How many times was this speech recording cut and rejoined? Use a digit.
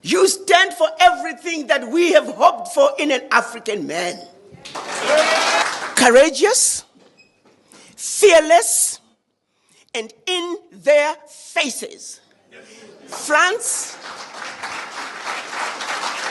1